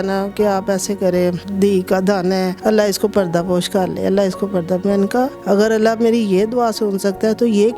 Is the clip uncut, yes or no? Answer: no